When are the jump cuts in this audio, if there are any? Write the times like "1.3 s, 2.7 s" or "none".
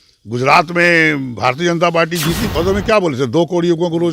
2.5 s